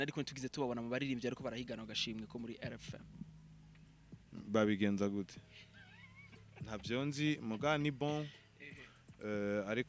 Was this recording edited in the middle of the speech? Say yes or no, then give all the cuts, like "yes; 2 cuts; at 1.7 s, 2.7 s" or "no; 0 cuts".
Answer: no; 0 cuts